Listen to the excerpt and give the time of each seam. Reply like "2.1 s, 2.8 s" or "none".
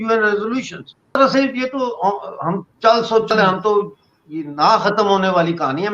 1.1 s